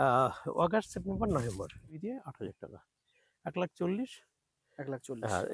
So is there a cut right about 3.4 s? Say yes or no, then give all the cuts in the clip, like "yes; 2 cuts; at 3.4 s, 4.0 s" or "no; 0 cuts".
no; 1 cut; at 1.9 s